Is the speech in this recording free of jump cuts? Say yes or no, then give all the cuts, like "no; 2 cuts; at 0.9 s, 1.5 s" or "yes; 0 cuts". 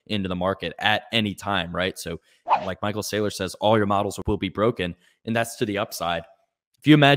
no; 2 cuts; at 2.5 s, 4.2 s